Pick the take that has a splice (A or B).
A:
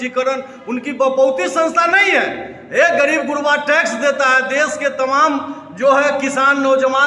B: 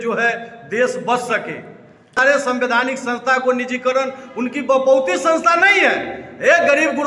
B